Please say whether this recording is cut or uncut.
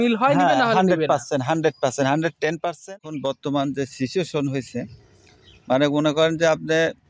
cut